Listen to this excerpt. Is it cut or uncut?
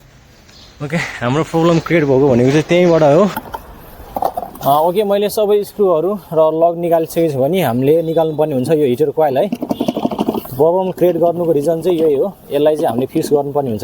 cut